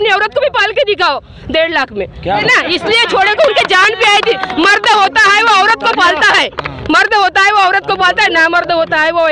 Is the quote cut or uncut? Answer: cut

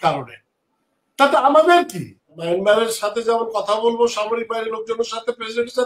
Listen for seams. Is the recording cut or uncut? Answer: cut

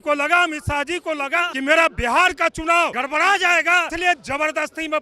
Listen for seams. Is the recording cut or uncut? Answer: cut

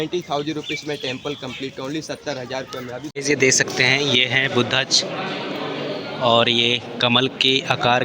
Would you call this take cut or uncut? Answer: cut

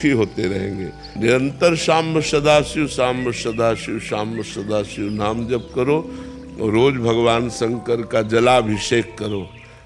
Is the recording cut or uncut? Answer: cut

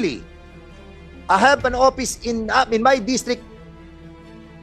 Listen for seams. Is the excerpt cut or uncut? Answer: uncut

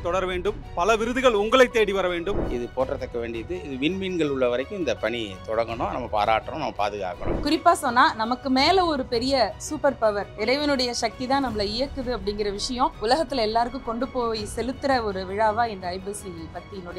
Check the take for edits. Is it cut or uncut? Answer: cut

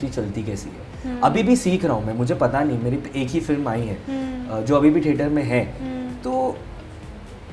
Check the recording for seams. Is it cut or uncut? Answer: uncut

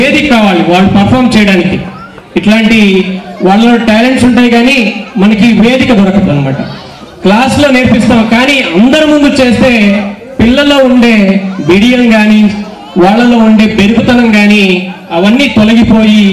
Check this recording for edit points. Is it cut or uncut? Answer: uncut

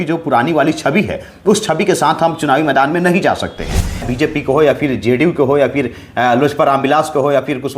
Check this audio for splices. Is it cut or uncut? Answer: cut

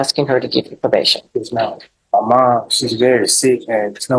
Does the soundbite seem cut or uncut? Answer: cut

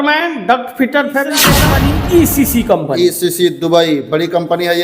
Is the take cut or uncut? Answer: cut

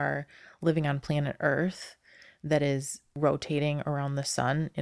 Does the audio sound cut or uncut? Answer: cut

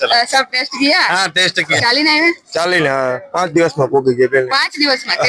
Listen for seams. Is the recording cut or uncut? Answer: cut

